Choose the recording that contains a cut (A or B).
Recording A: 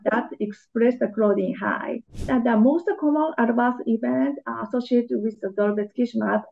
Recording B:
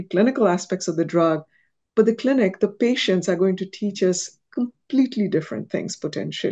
A